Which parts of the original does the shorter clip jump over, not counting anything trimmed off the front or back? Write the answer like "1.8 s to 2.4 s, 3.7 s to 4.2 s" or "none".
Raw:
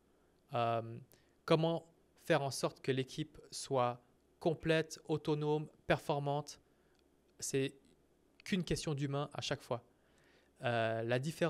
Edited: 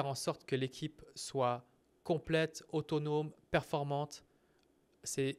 none

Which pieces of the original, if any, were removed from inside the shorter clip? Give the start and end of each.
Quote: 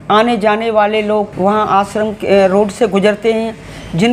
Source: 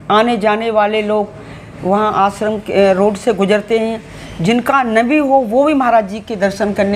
1.3 s to 1.8 s

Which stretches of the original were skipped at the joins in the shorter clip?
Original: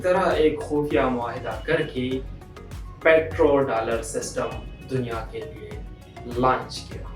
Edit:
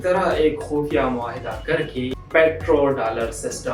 2.2 s to 2.9 s

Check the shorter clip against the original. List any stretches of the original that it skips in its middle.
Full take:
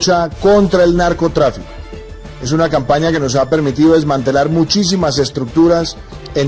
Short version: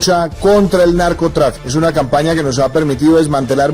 1.6 s to 2.4 s

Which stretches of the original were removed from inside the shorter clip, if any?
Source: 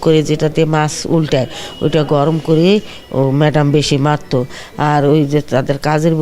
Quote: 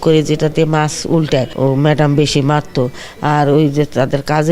1.5 s to 3.1 s

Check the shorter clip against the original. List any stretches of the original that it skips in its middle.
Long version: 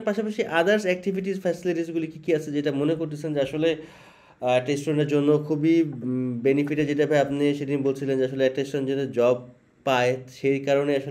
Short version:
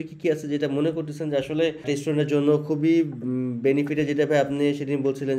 3.9 s to 4.6 s

